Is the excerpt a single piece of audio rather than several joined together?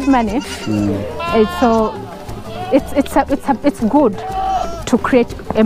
yes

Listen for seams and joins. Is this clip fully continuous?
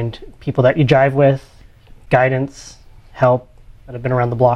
yes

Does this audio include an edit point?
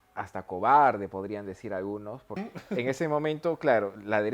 yes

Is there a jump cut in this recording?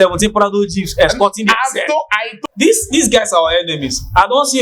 yes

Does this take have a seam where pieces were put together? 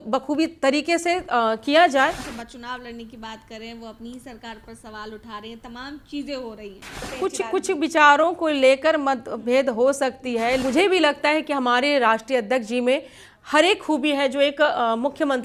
yes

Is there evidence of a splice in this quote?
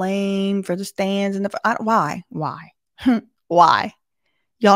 no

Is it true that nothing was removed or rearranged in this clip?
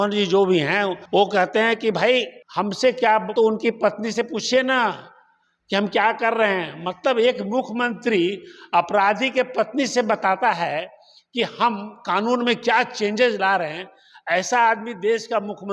no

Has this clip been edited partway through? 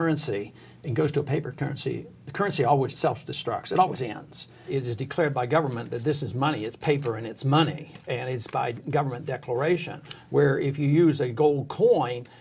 yes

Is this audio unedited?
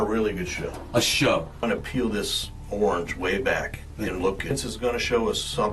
no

